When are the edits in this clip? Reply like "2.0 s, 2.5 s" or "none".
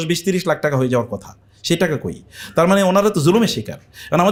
none